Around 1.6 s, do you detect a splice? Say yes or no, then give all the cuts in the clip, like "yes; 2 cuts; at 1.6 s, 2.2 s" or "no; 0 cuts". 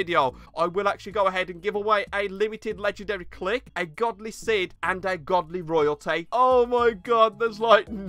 no; 3 cuts; at 3.7 s, 4.8 s, 6.3 s